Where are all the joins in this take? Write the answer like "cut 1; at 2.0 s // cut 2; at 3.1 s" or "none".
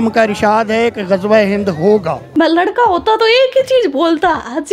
cut 1; at 2.3 s